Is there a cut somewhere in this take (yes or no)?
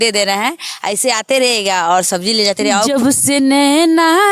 yes